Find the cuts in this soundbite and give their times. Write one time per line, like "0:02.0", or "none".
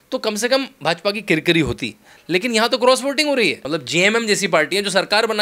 0:03.6